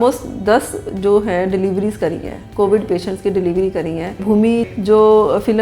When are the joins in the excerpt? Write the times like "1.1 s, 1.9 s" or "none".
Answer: 4.2 s